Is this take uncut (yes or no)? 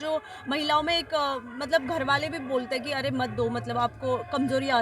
yes